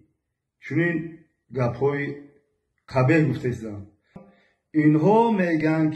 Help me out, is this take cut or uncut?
cut